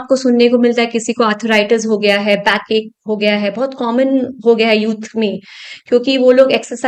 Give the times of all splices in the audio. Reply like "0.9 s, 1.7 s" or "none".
none